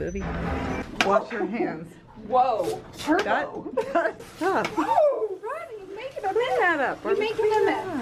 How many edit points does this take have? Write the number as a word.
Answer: two